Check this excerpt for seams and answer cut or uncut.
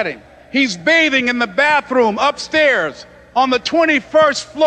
uncut